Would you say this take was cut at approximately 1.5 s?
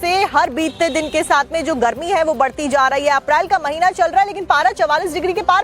yes; 1 cut; at 1.5 s

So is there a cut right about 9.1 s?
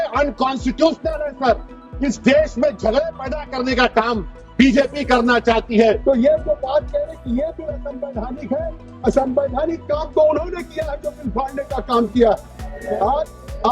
no; 1 cut; at 6.0 s

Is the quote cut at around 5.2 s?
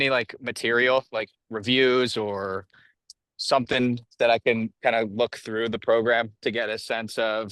no; 0 cuts

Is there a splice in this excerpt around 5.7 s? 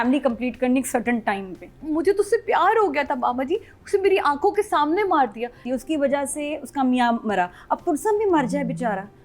yes; 2 cuts; at 1.8 s, 5.7 s

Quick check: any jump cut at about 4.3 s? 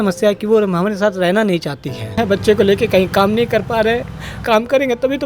yes; 2 cuts; at 2.2 s, 4.3 s

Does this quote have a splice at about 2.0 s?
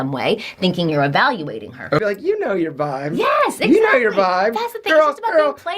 yes; 1 cut; at 2.0 s

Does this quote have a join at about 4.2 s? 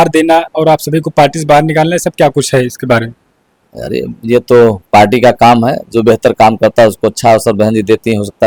no; 0 cuts

